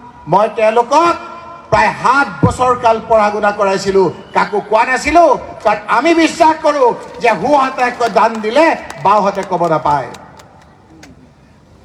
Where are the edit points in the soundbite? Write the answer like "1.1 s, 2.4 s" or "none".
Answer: none